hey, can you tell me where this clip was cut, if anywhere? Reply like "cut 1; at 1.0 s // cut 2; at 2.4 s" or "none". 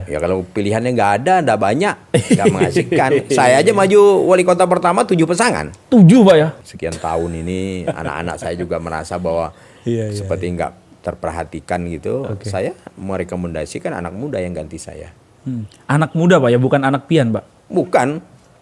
cut 1; at 6.6 s